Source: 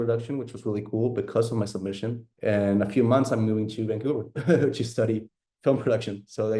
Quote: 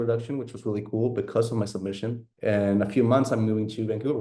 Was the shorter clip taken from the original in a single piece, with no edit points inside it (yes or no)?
yes